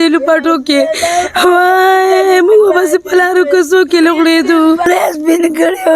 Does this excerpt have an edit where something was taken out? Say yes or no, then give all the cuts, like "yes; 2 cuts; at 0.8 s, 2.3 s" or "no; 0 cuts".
yes; 1 cut; at 4.9 s